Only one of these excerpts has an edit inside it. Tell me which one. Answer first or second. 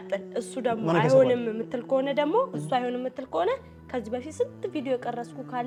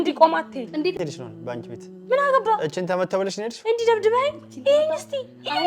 second